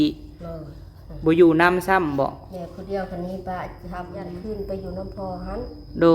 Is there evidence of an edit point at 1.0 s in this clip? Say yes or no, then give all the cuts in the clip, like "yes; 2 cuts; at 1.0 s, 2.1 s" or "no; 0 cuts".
no; 1 cut; at 4.2 s